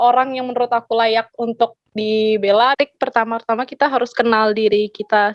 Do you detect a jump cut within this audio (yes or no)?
yes